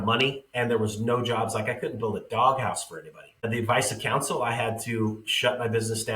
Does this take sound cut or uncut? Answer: cut